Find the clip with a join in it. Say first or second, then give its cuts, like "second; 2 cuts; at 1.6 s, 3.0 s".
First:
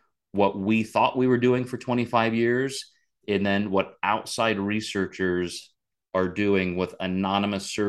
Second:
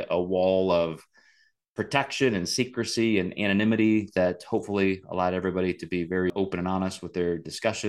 second; 1 cut; at 6.3 s